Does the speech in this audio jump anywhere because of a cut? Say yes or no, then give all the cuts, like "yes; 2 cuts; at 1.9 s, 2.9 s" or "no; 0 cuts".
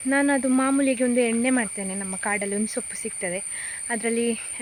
no; 0 cuts